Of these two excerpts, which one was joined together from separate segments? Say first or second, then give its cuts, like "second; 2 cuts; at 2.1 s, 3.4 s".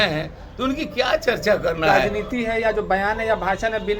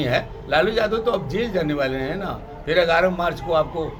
first; 1 cut; at 1.9 s